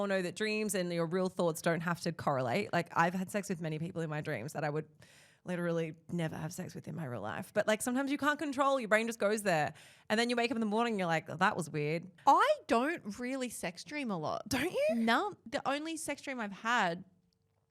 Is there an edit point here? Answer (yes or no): yes